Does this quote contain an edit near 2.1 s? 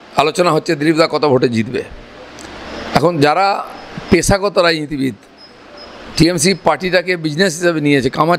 no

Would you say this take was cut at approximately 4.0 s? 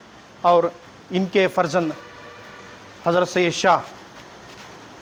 no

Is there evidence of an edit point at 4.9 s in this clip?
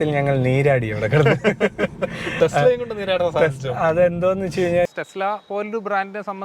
yes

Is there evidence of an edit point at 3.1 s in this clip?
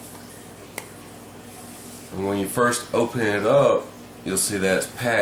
yes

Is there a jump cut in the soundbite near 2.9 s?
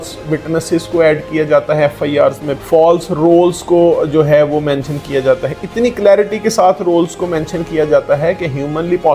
no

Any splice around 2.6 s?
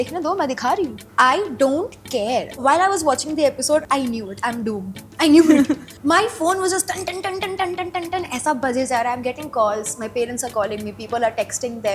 yes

